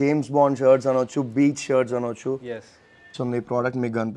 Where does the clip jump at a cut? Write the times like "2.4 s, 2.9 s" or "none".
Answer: 3.1 s